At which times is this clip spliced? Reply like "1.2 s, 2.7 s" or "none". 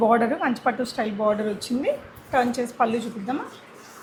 none

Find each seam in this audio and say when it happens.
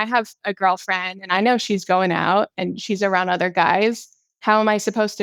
none

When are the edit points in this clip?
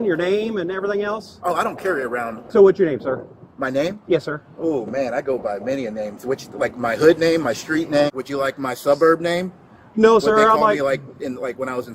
2.4 s, 8.1 s

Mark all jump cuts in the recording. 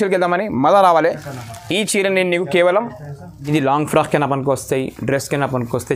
3.5 s

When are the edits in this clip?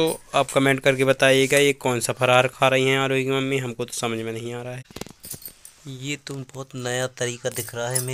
4.9 s

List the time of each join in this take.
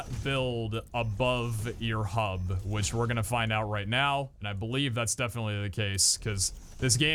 none

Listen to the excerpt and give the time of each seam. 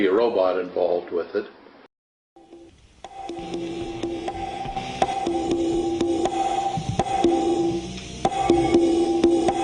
1.9 s

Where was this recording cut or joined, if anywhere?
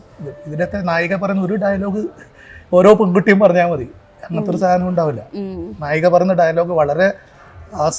none

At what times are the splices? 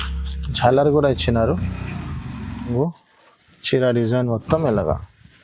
2.7 s

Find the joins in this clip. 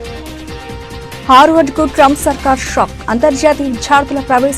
1.2 s

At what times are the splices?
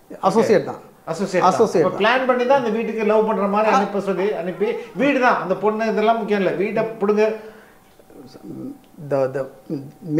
none

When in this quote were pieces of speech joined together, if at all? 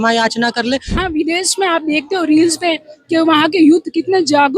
1.0 s

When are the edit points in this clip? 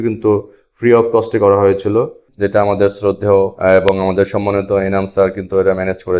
2.2 s

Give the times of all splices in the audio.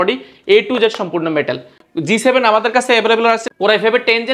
1.8 s, 3.4 s

